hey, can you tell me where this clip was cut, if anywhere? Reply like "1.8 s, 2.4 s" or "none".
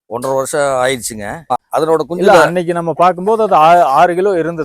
1.5 s